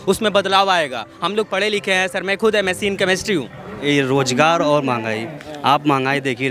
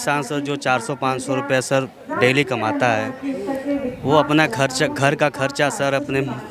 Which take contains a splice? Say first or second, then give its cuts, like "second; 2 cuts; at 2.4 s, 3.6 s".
first; 1 cut; at 3.7 s